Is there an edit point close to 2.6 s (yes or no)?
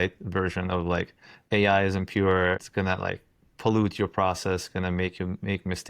yes